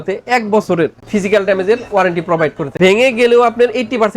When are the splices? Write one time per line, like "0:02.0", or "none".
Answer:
0:02.6